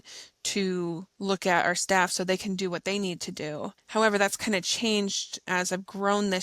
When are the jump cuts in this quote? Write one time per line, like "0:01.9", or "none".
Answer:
0:01.1
0:03.8
0:05.3